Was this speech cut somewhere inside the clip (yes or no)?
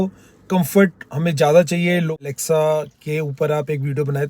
yes